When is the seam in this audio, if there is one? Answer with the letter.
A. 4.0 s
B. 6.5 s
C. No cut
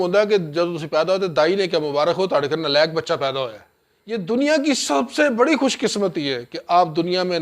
A